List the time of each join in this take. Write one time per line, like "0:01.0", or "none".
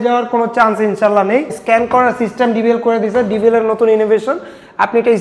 0:01.6